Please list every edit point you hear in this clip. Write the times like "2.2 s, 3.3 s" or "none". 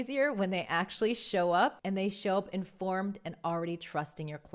1.8 s